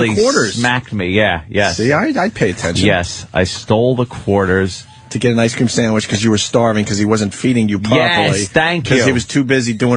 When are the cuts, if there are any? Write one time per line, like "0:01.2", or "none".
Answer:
none